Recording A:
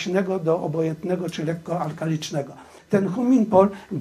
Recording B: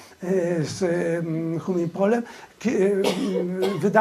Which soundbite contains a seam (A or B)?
A